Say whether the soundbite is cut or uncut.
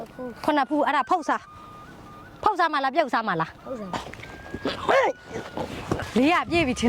cut